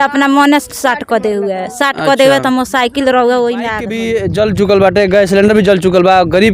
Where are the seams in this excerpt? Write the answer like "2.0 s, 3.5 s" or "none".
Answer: 4.0 s